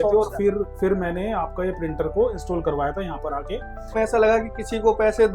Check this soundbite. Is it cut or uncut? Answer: cut